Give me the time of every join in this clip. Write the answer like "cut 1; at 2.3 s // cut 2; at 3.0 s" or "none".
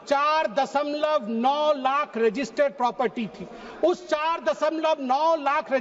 none